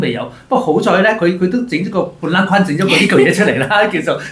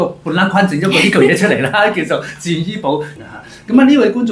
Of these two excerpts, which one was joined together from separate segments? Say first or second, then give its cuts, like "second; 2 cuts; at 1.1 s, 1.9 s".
second; 1 cut; at 3.3 s